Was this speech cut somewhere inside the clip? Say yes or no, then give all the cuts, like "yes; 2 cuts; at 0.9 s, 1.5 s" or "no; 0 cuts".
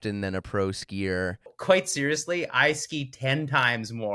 yes; 1 cut; at 1.5 s